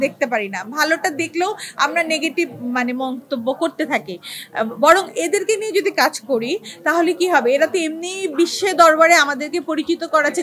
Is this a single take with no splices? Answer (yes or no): yes